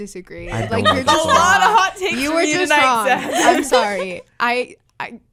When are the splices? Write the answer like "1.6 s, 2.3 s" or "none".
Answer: none